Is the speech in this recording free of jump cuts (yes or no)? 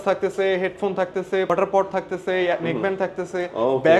no